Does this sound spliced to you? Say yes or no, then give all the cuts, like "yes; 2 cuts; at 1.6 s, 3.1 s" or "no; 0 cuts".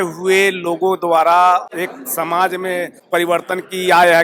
yes; 2 cuts; at 1.7 s, 3.0 s